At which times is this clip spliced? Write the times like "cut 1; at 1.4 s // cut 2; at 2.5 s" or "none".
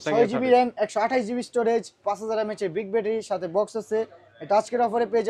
none